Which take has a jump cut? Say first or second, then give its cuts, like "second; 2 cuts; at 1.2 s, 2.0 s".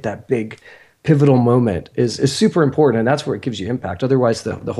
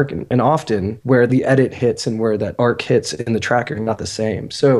second; 2 cuts; at 1.2 s, 2.5 s